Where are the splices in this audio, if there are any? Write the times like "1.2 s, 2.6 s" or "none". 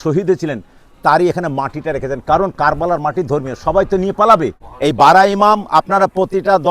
4.6 s